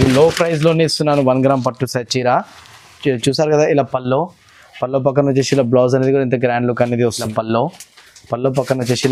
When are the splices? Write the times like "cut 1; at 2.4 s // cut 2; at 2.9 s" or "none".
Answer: cut 1; at 7.3 s